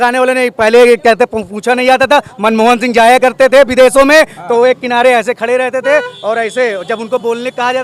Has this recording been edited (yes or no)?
no